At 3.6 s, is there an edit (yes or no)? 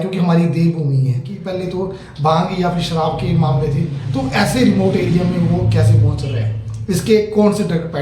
no